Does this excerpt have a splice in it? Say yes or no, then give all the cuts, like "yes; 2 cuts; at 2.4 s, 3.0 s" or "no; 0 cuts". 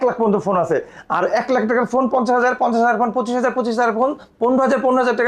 no; 0 cuts